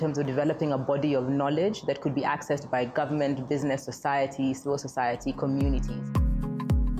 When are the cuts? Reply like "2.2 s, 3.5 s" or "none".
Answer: 5.9 s